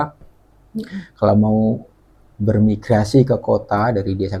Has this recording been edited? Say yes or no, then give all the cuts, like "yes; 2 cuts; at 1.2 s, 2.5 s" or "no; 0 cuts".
no; 0 cuts